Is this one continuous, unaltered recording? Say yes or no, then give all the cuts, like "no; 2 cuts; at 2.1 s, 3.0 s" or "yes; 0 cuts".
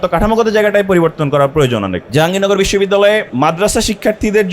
no; 2 cuts; at 2.0 s, 3.3 s